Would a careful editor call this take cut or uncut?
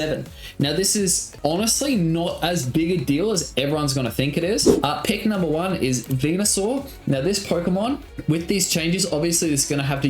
cut